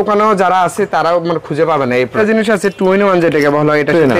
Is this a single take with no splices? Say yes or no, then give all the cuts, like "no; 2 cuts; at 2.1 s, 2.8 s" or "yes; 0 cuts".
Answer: no; 1 cut; at 2.1 s